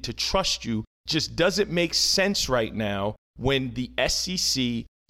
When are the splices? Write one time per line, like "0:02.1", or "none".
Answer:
0:01.0
0:03.3